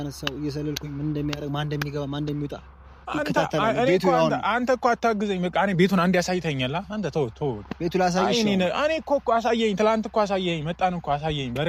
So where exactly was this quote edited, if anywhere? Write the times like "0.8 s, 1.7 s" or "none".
none